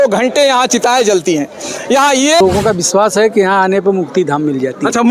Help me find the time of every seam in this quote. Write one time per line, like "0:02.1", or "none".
0:02.4